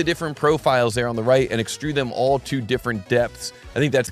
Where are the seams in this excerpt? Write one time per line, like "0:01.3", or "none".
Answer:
none